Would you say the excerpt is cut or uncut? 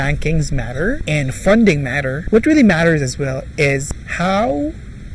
cut